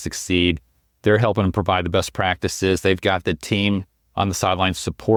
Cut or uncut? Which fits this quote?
uncut